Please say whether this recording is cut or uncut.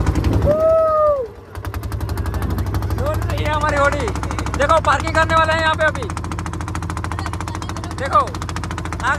uncut